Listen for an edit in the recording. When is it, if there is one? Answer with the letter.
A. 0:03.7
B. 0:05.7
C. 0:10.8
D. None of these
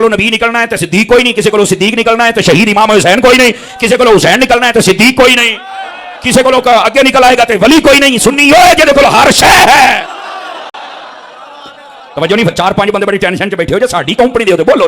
D